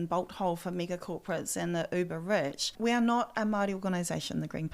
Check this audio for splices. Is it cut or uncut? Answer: cut